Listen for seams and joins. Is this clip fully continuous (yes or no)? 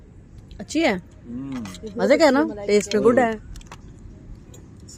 yes